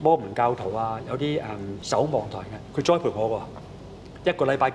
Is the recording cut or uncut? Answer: cut